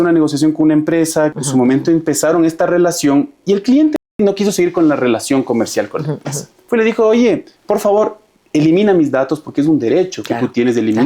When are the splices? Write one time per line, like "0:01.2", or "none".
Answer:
0:01.4
0:04.1
0:07.5